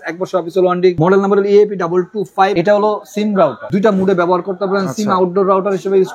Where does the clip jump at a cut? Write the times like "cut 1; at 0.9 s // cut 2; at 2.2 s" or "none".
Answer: cut 1; at 1.0 s // cut 2; at 2.5 s // cut 3; at 3.6 s